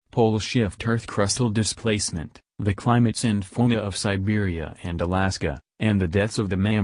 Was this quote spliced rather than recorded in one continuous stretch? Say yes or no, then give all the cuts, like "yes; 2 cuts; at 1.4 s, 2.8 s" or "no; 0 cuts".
no; 0 cuts